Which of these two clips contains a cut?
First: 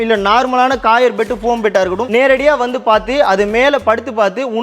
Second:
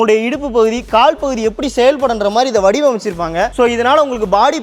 first; 1 cut; at 2.0 s

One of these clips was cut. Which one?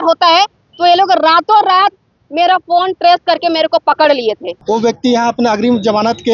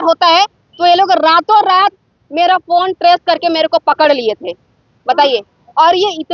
first; 1 cut; at 4.5 s

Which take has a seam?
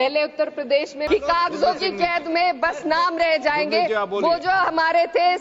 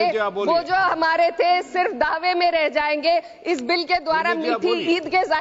first; 1 cut; at 1.0 s

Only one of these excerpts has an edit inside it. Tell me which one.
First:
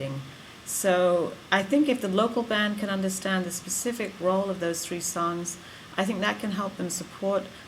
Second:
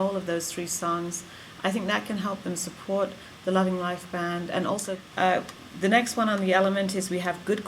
second; 1 cut; at 5.0 s

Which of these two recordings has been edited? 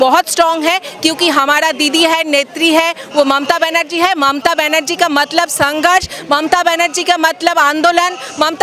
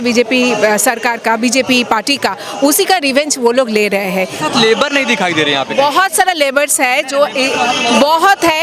second; 1 cut; at 4.4 s

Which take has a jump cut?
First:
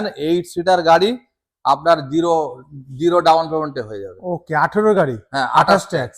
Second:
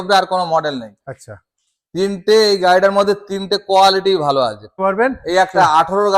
second; 1 cut; at 4.7 s

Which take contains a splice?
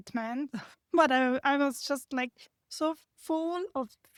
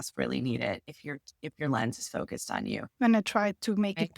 second; 1 cut; at 2.8 s

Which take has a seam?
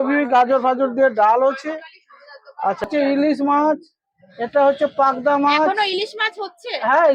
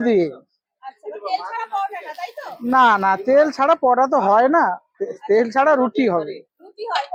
first; 1 cut; at 2.8 s

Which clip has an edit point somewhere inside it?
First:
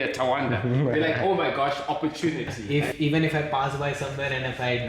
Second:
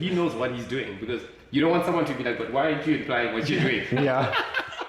first; 1 cut; at 2.8 s

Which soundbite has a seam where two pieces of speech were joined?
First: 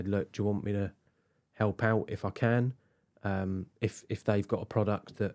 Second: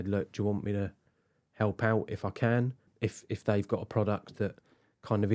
second; 1 cut; at 2.9 s

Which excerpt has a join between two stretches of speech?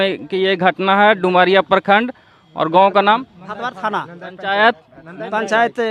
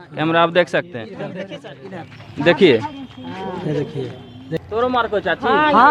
second; 1 cut; at 4.6 s

